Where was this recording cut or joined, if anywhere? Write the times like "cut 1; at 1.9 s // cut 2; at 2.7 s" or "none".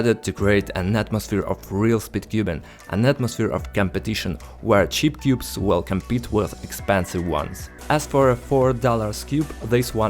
cut 1; at 7.8 s